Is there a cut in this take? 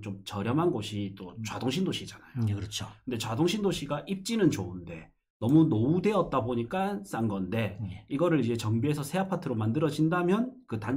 no; 0 cuts

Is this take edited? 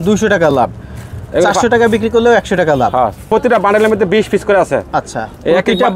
yes; 1 cut; at 3.3 s

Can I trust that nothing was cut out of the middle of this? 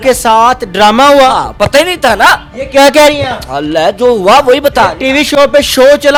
yes; 0 cuts

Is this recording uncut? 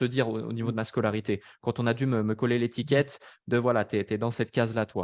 yes; 0 cuts

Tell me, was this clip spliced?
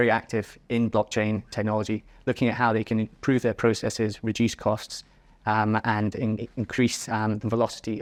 no; 0 cuts

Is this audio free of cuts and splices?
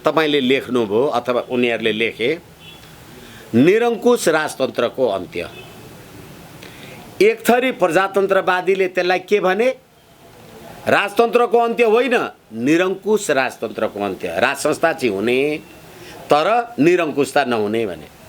yes; 0 cuts

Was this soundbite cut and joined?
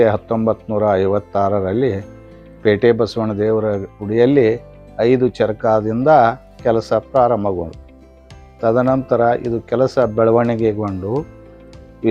no; 0 cuts

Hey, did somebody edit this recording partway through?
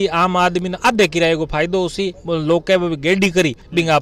yes; 1 cut; at 2.2 s

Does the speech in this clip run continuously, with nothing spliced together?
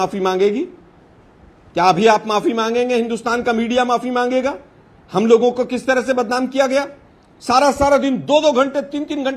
yes; 0 cuts

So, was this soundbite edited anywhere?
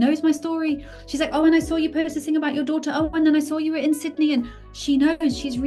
no; 0 cuts

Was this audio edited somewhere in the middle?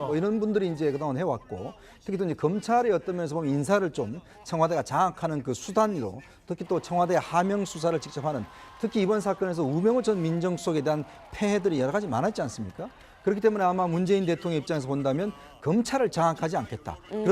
yes; 1 cut; at 8.3 s

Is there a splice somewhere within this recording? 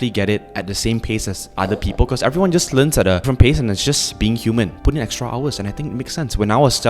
yes; 2 cuts; at 3.2 s, 4.8 s

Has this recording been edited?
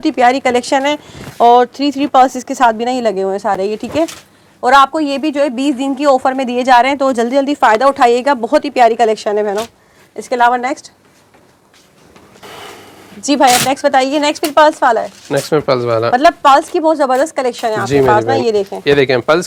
no; 0 cuts

